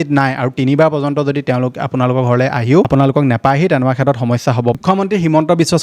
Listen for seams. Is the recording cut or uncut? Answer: cut